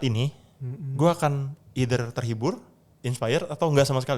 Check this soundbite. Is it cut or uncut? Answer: uncut